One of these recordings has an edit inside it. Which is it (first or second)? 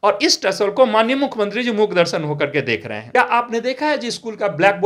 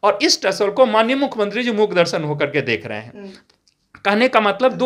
first